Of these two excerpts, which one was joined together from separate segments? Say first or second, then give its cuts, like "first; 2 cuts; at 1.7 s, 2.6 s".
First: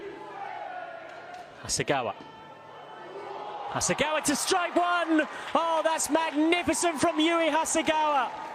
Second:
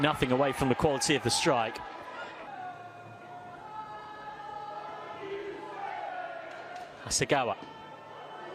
second; 1 cut; at 2.2 s